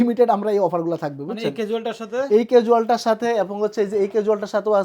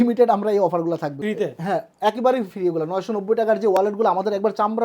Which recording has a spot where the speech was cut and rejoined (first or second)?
second